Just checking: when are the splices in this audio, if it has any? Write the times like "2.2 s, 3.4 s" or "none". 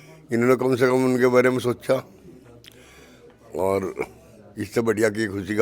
none